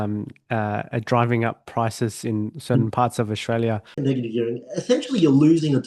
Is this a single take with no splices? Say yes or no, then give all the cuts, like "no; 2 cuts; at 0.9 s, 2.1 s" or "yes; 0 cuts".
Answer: no; 1 cut; at 4.0 s